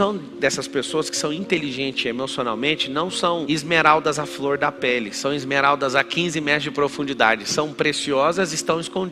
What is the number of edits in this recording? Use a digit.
0